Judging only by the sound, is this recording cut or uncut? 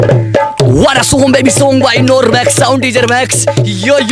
uncut